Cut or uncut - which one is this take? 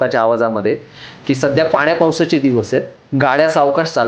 cut